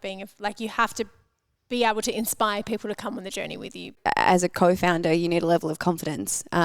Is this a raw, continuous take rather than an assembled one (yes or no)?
no